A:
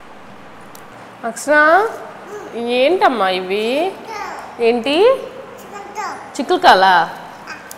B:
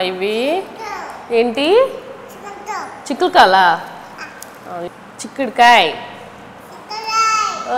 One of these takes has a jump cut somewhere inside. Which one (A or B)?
A